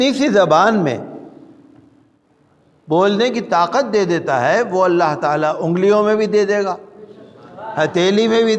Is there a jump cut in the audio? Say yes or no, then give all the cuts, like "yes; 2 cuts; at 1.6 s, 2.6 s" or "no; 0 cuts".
yes; 1 cut; at 2.2 s